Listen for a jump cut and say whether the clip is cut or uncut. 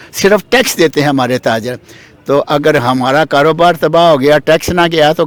uncut